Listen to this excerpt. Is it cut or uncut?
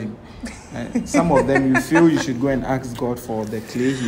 uncut